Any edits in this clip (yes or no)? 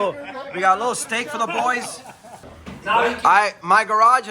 yes